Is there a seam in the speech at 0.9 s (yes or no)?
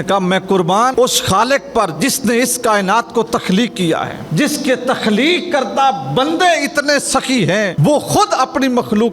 yes